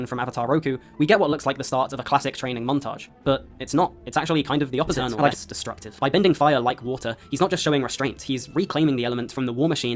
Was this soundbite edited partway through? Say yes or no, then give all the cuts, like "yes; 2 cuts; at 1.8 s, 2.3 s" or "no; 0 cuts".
yes; 1 cut; at 5.4 s